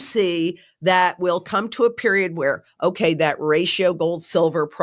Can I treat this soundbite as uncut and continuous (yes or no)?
yes